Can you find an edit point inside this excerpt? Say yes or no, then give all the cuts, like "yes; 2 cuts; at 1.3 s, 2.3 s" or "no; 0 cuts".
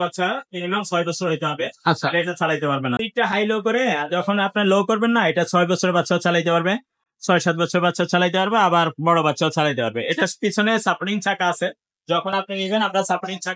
yes; 1 cut; at 3.0 s